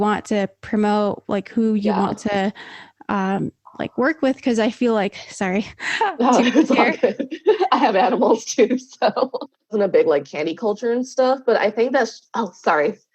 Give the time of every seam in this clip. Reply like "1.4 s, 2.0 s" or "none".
9.7 s

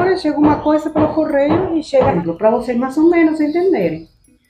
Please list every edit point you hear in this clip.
2.1 s

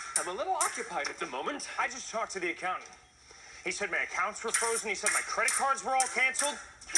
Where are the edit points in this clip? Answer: 4.5 s

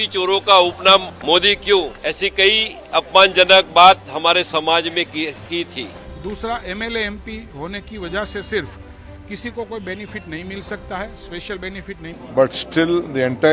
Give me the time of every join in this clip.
1.1 s, 1.9 s, 6.0 s, 12.2 s

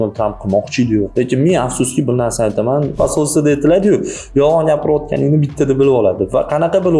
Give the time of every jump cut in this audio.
2.9 s

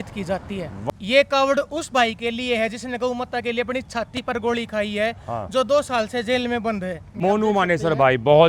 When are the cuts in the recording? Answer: 0.8 s, 7.1 s

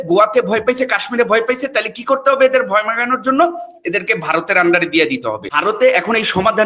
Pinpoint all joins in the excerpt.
5.5 s

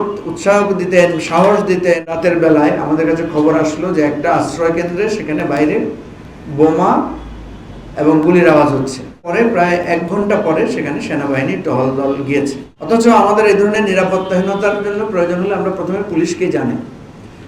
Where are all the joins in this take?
2.1 s, 9.3 s, 12.7 s

